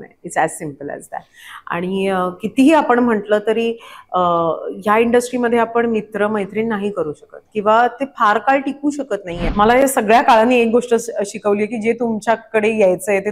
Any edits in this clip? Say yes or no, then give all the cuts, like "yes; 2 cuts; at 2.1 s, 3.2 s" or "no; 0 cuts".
yes; 1 cut; at 9.4 s